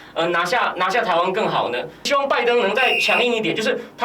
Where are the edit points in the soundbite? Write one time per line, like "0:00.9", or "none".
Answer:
0:02.1